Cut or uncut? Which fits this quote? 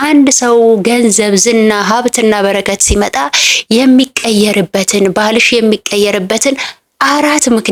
uncut